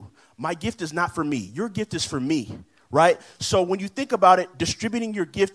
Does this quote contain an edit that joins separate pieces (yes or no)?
no